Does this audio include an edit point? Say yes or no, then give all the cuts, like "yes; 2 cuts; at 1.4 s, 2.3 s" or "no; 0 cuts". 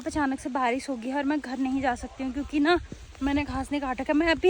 no; 0 cuts